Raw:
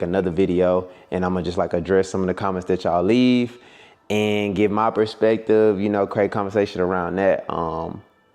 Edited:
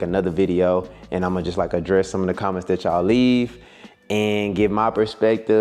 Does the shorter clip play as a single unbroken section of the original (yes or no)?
yes